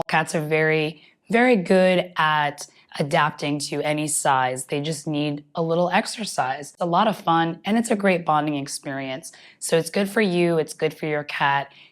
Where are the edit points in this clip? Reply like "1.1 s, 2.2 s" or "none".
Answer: 6.7 s